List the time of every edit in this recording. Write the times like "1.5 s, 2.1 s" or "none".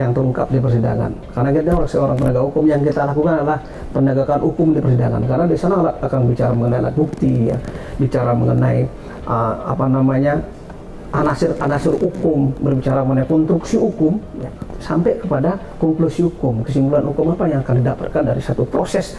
none